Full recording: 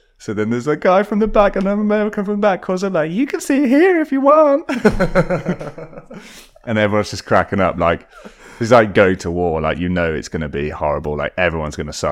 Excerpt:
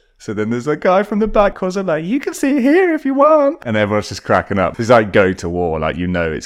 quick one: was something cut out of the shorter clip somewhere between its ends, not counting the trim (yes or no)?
yes